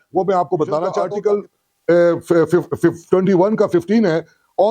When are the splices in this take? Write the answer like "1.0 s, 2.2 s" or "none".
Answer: 1.0 s